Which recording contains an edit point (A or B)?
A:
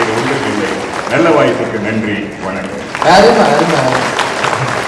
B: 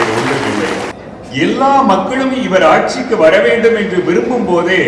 B